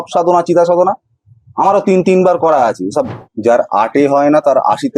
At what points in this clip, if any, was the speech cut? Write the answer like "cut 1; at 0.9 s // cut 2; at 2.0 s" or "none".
cut 1; at 3.2 s